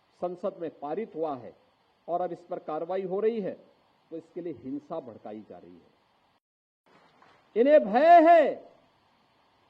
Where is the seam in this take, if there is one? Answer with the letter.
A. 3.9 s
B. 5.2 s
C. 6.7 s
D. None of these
C